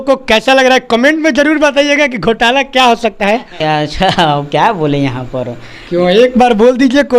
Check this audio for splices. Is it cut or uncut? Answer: cut